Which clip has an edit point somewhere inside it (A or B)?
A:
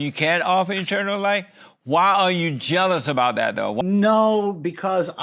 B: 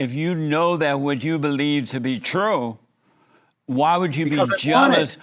A